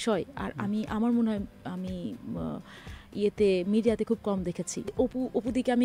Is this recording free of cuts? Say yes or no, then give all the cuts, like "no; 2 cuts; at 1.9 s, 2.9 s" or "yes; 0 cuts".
no; 1 cut; at 4.8 s